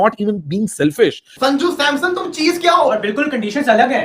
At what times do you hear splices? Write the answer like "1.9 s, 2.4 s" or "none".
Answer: 1.3 s